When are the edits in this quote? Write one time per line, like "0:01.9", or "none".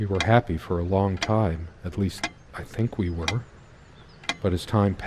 none